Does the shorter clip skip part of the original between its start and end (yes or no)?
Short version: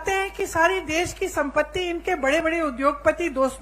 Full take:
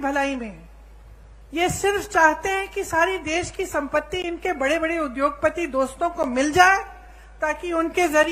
no